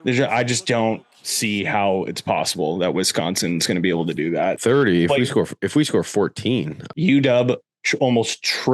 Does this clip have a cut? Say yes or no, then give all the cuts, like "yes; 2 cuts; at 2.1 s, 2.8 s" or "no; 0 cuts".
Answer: yes; 1 cut; at 6.8 s